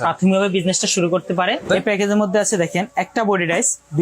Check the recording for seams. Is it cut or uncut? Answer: cut